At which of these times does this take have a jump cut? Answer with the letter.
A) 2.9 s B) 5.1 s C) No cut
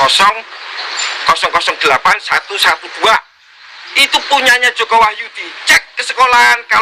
C